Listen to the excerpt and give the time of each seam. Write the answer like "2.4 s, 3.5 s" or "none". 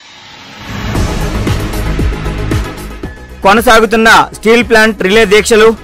none